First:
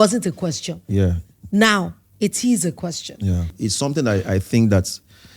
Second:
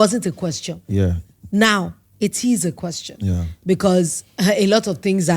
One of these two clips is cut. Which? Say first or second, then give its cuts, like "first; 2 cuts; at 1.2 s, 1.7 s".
first; 1 cut; at 3.5 s